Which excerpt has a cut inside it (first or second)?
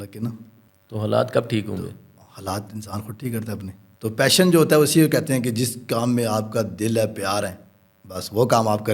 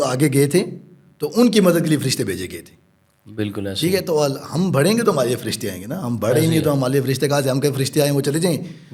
first